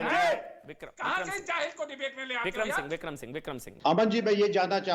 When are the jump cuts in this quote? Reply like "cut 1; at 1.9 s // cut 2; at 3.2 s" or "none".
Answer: cut 1; at 4.0 s